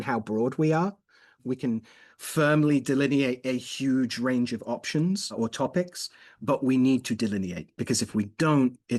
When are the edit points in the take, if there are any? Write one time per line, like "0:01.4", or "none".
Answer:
0:01.4
0:05.3
0:07.8